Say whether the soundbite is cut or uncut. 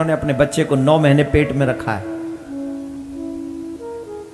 uncut